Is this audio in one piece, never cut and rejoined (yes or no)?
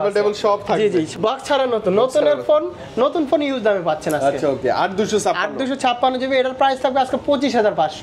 no